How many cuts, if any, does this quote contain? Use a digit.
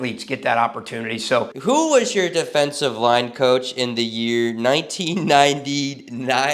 1